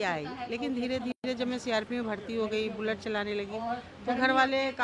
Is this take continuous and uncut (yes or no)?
yes